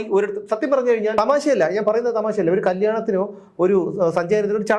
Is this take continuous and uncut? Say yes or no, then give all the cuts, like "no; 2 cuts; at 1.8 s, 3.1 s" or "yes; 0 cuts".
no; 1 cut; at 1.1 s